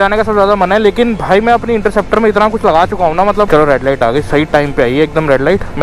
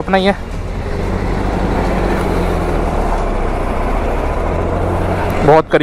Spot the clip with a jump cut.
first; 1 cut; at 3.5 s

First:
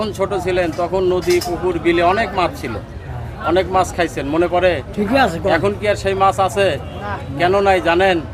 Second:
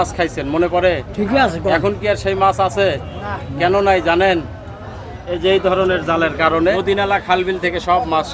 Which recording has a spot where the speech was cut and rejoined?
second; 1 cut; at 6.8 s

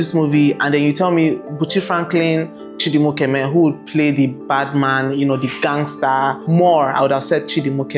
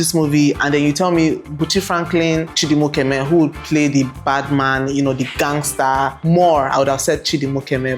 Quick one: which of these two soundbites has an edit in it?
second; 1 cut; at 2.5 s

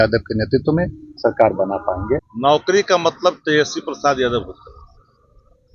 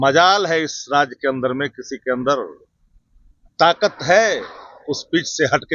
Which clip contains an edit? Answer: first; 1 cut; at 2.3 s

